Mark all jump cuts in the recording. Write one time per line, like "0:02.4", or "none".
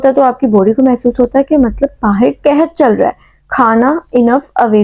none